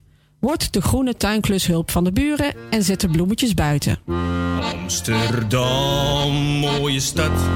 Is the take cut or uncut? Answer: uncut